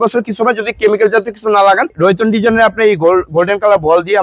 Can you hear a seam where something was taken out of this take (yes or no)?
yes